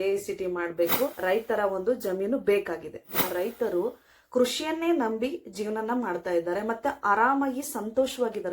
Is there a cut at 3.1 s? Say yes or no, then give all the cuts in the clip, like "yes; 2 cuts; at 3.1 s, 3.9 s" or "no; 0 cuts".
yes; 2 cuts; at 1.2 s, 3.1 s